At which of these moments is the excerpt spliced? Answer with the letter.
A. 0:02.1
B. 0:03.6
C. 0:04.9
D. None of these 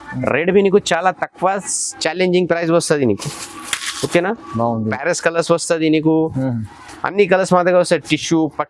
C